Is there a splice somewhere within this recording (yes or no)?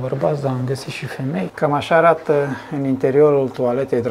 yes